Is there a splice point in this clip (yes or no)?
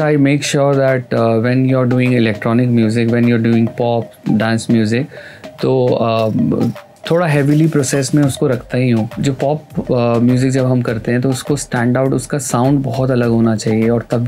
no